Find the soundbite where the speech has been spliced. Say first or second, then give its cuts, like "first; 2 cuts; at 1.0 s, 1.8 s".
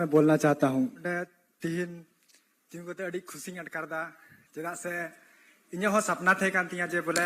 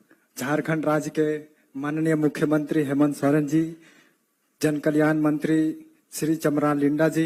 first; 1 cut; at 1.0 s